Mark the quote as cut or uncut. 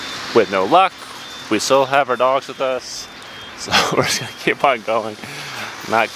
uncut